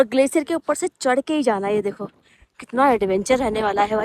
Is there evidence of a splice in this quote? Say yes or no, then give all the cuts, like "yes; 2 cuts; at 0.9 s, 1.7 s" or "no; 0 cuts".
no; 0 cuts